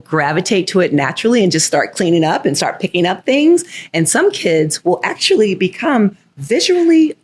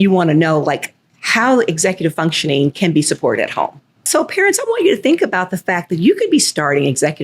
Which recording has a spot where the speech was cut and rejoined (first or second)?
second